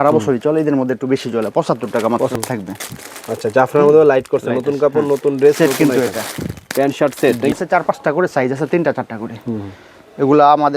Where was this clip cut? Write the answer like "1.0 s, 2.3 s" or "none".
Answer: 2.3 s, 7.5 s